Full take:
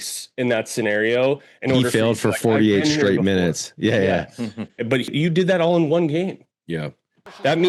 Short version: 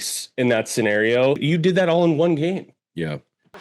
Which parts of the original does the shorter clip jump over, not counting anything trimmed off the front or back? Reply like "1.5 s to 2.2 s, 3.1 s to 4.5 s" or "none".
1.4 s to 5.1 s